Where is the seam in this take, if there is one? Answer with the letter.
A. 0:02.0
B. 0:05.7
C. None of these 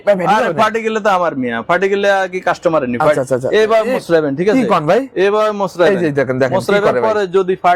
C